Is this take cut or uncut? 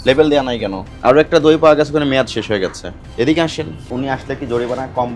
cut